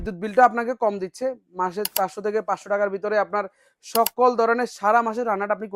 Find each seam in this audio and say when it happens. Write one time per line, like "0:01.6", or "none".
none

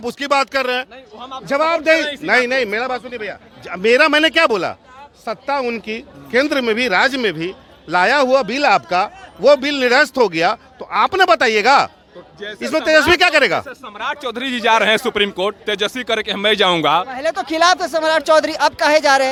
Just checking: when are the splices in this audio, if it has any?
none

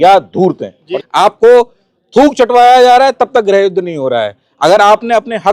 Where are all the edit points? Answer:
0:00.9

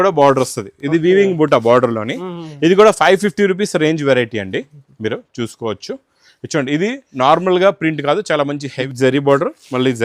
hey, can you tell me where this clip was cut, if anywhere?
0:08.7

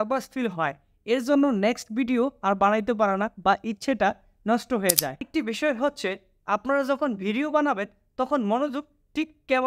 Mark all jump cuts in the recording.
0:05.3

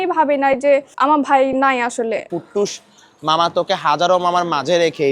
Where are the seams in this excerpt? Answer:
0:02.3

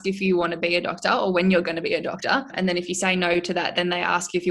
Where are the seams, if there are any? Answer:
0:02.5

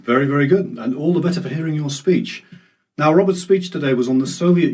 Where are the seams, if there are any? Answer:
0:01.9

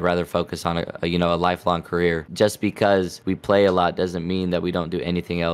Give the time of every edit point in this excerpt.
0:02.2
0:03.2

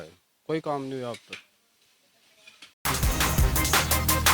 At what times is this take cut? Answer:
0:02.9

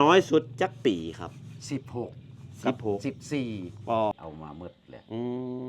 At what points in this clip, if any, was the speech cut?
0:04.1

